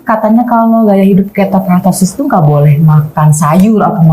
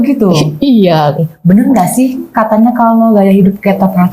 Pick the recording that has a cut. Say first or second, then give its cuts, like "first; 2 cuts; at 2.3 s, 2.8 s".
second; 1 cut; at 1.3 s